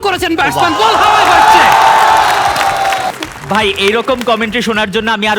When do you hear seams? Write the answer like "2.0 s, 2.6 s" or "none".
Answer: 3.1 s